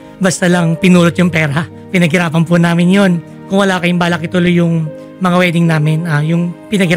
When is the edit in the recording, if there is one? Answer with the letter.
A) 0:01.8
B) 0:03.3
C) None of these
B